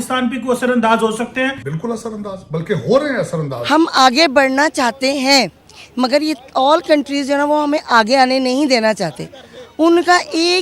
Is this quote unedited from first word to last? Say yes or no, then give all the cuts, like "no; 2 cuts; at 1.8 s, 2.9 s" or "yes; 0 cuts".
no; 2 cuts; at 1.7 s, 3.6 s